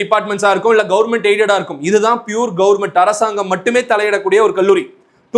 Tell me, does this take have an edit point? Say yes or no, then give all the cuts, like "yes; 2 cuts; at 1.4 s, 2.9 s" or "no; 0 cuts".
no; 0 cuts